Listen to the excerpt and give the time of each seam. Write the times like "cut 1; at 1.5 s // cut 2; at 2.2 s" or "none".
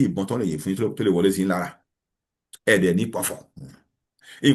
none